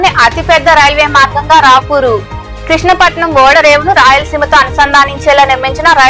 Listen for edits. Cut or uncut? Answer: uncut